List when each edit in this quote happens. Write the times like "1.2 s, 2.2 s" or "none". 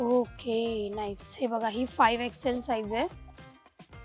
3.1 s